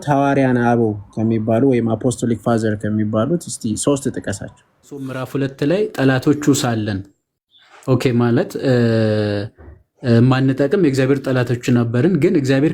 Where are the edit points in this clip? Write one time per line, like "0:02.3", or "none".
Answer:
0:05.2